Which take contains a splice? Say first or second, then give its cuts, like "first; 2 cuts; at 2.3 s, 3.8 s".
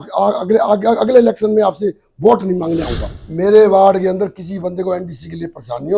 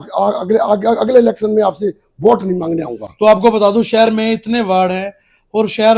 first; 1 cut; at 3.0 s